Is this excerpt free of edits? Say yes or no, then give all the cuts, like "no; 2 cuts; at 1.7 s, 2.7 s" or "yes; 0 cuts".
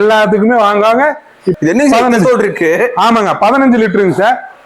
no; 1 cut; at 1.5 s